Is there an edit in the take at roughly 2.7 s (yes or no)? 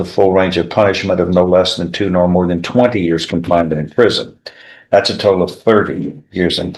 no